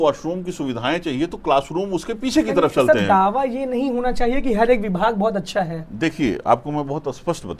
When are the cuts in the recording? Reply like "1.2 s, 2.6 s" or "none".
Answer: none